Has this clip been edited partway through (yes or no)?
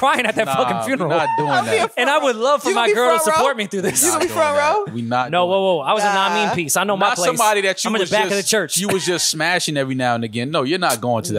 no